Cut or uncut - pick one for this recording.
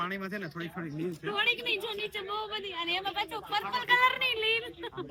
uncut